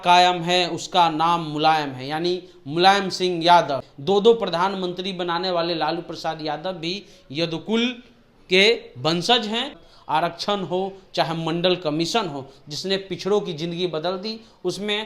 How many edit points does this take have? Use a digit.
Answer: 2